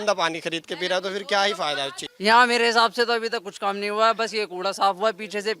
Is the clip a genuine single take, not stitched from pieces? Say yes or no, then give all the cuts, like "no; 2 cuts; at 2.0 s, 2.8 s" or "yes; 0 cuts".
no; 1 cut; at 2.0 s